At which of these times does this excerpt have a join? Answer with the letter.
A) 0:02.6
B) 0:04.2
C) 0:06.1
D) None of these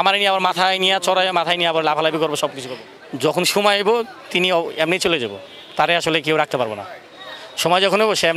D